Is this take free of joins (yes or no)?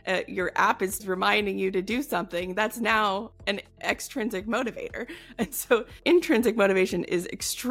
yes